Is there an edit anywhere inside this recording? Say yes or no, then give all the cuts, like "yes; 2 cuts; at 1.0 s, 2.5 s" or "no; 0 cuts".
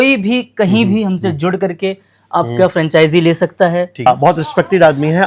yes; 1 cut; at 4.1 s